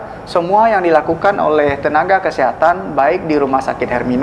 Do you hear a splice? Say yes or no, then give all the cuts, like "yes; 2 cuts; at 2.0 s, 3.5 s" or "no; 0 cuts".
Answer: no; 0 cuts